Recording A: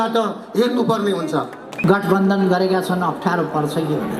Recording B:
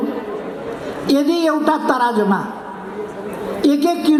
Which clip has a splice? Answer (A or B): A